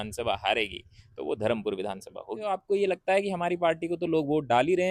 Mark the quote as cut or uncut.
cut